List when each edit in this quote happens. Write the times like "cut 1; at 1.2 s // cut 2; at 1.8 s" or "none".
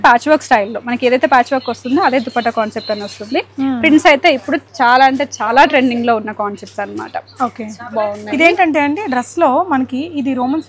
none